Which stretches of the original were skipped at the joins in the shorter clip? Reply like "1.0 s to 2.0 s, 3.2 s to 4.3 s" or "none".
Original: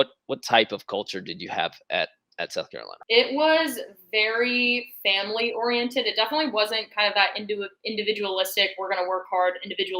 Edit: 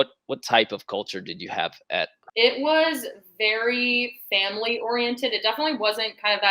2.2 s to 2.9 s